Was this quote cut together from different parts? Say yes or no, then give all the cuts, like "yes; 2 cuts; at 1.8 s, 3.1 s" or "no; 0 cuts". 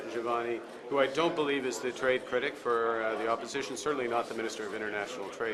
no; 0 cuts